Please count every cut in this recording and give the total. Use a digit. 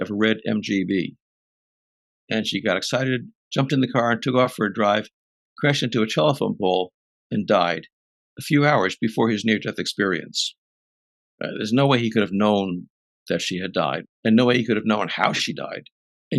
1